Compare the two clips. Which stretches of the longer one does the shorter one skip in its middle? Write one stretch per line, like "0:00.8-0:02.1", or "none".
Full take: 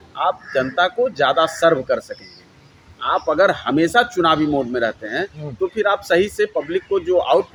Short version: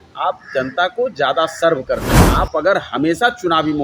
0:02.2-0:02.9